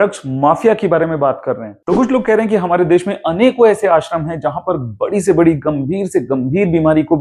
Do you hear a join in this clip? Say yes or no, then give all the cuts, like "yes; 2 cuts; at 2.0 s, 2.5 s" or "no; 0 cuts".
no; 0 cuts